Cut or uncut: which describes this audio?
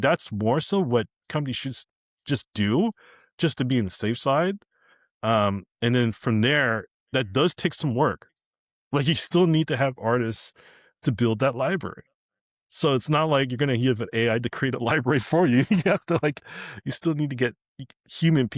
uncut